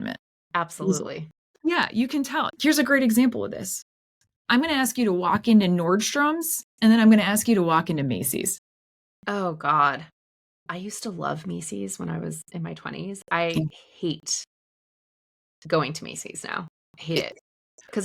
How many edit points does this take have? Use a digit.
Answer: 1